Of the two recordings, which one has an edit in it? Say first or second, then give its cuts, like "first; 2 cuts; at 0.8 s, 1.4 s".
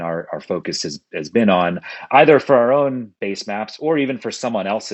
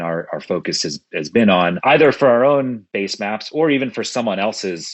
second; 1 cut; at 1.8 s